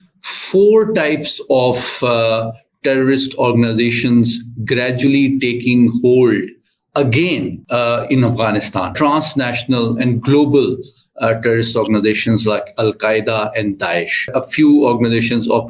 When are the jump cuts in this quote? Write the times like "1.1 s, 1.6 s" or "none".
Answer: 7.6 s, 8.9 s, 14.3 s

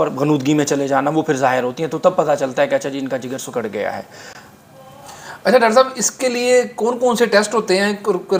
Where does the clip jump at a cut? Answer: none

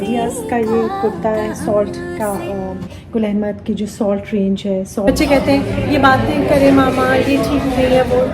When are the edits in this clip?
5.1 s

